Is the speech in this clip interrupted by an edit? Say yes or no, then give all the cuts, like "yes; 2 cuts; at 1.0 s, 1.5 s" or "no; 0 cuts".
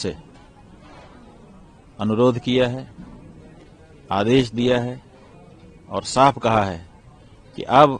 no; 0 cuts